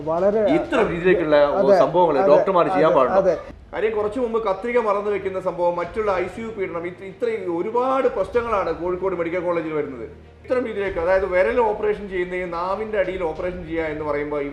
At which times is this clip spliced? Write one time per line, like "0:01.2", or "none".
0:03.5
0:10.4